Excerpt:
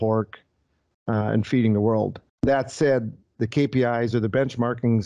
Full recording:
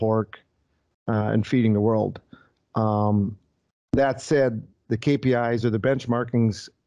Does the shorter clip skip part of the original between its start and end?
yes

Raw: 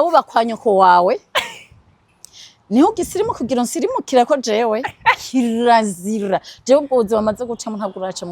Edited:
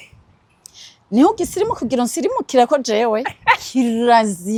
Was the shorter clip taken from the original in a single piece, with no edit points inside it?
yes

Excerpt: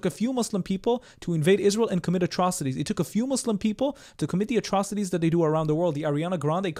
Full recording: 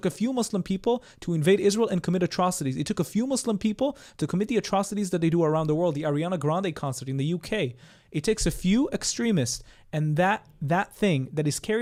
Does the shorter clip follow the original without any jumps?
yes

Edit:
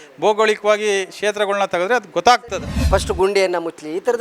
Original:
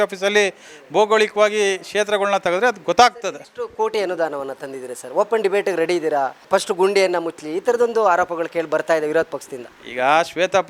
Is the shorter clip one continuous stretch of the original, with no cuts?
no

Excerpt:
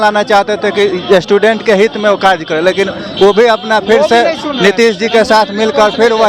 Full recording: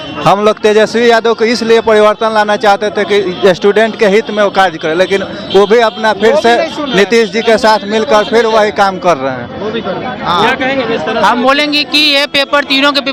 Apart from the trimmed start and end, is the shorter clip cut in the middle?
no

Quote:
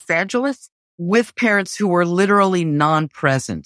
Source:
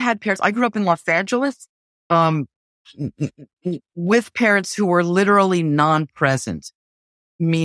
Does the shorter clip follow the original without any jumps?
no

